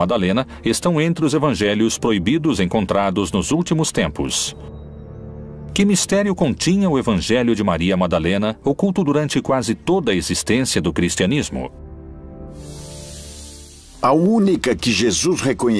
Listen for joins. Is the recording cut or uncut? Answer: uncut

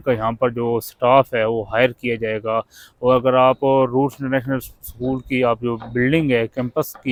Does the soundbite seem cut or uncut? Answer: uncut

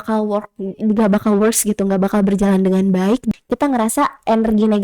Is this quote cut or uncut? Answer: cut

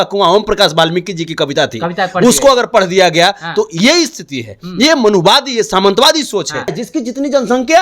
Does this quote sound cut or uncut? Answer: cut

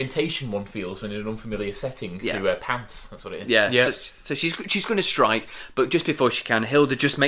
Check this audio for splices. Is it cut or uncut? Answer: uncut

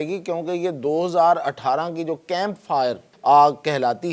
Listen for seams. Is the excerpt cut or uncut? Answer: cut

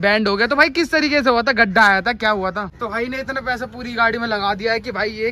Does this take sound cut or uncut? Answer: cut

